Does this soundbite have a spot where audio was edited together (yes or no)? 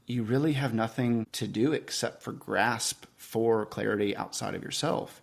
yes